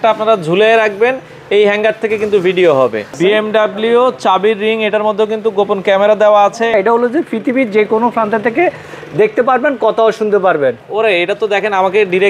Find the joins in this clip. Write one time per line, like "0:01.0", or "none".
0:03.2
0:06.7
0:10.8